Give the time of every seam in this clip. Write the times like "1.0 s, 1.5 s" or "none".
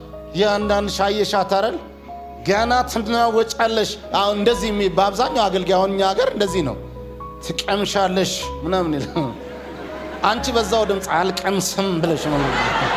none